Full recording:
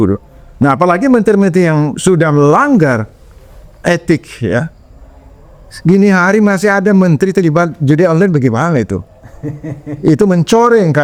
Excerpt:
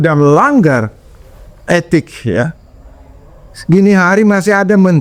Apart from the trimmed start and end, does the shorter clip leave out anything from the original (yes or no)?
no